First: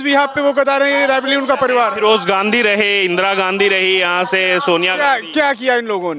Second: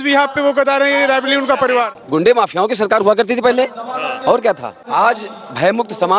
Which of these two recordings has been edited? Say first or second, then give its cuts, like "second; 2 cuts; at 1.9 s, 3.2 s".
second; 2 cuts; at 1.9 s, 4.8 s